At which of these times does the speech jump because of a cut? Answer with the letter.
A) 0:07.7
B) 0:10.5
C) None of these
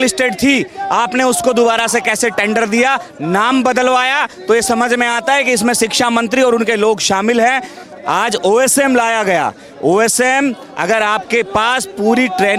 C